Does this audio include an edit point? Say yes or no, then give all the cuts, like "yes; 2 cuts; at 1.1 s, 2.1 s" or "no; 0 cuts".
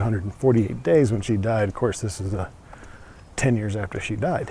no; 0 cuts